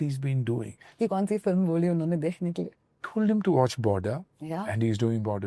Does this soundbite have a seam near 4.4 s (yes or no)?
no